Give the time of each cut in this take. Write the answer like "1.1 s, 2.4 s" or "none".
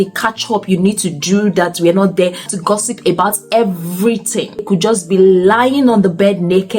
2.5 s, 4.6 s